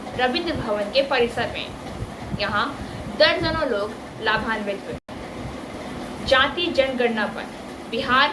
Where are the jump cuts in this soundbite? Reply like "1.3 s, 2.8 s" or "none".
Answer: 5.0 s